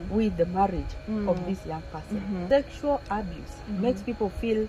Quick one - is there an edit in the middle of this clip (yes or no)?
yes